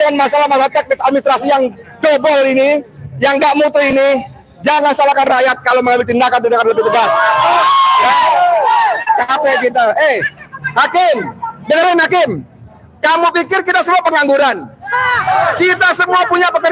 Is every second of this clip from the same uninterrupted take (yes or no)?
yes